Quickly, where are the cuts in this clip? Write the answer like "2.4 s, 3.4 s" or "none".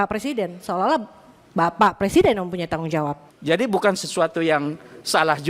3.3 s